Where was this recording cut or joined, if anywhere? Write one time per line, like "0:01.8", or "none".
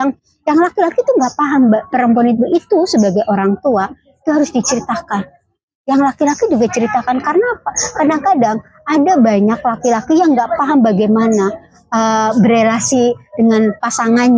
none